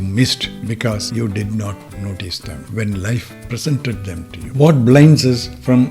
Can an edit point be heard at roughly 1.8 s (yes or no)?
no